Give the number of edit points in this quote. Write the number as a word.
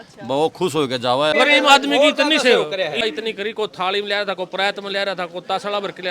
two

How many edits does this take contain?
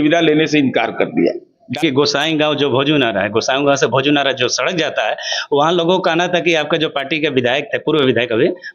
one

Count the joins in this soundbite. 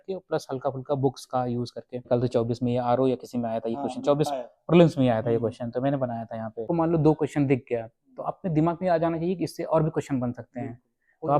two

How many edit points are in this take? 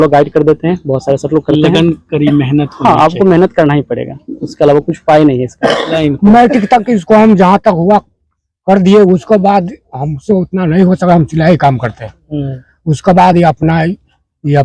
one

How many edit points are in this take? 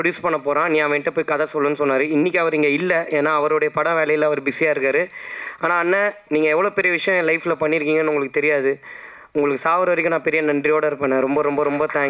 zero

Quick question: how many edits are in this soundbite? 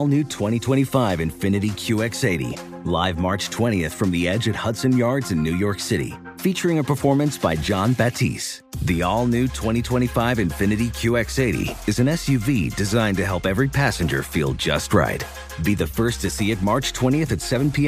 zero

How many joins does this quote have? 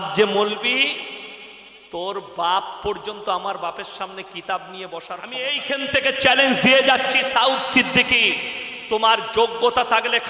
one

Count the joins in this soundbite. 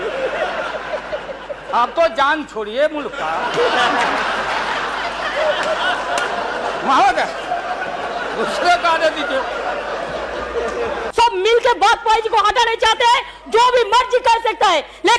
one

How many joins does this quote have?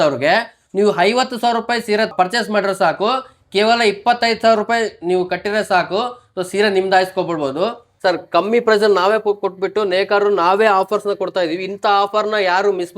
one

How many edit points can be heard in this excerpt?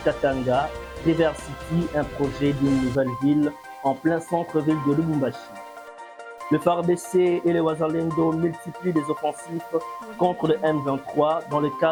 zero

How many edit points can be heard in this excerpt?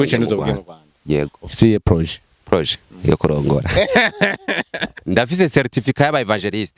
one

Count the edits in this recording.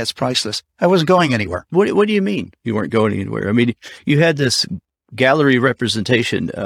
one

